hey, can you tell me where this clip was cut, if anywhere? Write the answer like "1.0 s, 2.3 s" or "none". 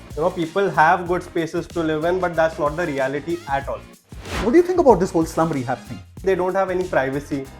4.4 s, 6.2 s

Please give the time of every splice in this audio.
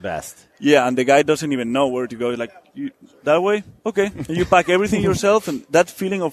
none

